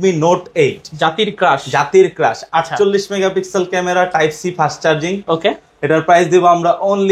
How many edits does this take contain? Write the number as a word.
zero